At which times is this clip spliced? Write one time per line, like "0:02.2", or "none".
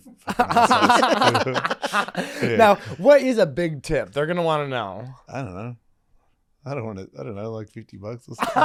none